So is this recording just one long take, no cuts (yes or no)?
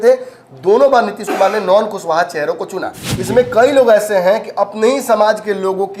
no